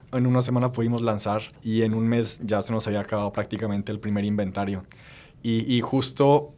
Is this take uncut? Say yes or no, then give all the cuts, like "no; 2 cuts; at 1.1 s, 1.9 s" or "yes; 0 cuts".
yes; 0 cuts